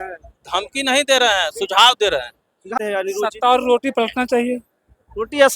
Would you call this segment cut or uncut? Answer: cut